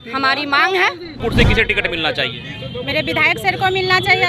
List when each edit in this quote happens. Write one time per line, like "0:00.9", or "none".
0:01.2